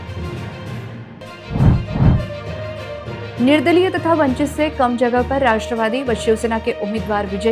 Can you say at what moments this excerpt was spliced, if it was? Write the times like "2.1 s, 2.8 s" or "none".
1.1 s